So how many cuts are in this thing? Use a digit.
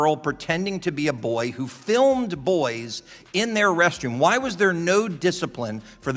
0